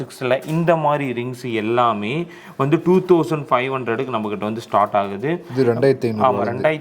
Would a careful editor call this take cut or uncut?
uncut